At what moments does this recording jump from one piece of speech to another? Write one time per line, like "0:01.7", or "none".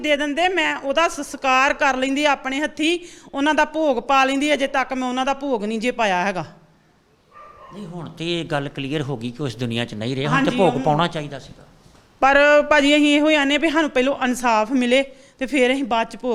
none